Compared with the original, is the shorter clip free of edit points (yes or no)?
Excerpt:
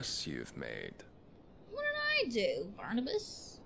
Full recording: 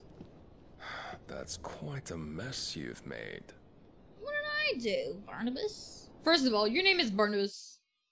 yes